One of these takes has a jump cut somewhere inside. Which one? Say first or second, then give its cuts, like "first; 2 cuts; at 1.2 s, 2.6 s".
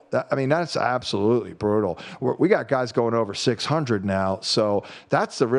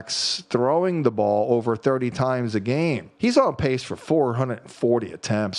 second; 1 cut; at 3.1 s